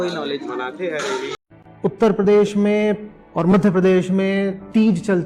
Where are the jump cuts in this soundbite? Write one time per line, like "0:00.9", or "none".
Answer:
0:01.4